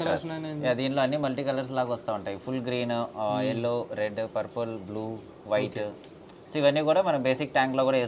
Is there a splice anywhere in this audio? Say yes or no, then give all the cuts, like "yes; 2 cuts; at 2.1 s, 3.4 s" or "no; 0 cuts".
no; 0 cuts